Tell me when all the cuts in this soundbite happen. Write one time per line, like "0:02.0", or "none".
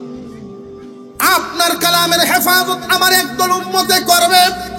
0:00.9